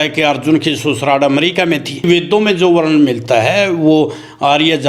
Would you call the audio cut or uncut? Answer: cut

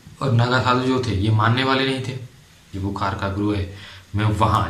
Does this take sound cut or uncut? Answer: cut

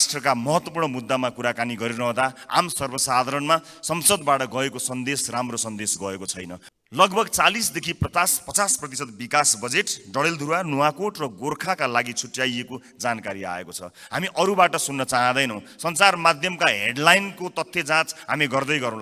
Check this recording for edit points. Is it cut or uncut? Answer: cut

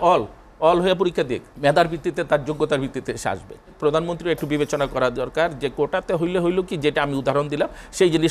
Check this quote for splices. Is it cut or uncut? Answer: cut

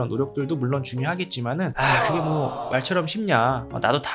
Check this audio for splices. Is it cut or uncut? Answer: cut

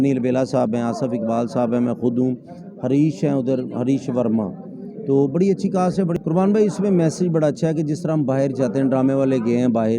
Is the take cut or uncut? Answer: cut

